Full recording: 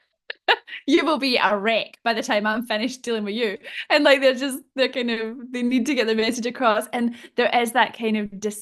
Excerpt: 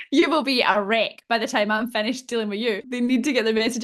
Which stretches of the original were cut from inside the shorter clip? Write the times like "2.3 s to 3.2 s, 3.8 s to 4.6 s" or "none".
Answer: 3.6 s to 5.5 s